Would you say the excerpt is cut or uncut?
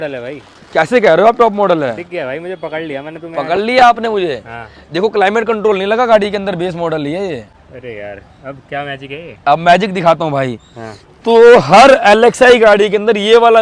uncut